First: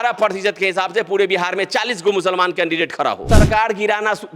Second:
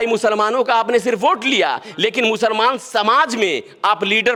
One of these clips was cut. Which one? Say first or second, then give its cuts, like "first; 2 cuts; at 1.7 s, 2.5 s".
first; 1 cut; at 3.2 s